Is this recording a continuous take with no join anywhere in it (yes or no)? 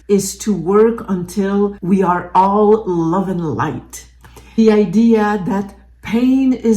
no